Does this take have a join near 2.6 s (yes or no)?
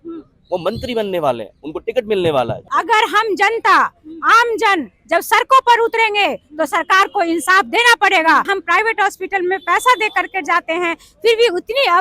yes